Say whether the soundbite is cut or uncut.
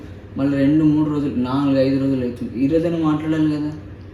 uncut